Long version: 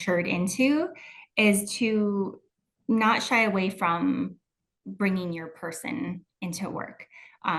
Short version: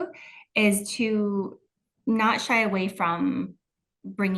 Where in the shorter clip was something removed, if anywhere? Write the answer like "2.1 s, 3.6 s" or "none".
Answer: none